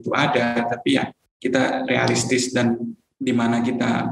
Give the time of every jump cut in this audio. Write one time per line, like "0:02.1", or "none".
0:01.2
0:03.0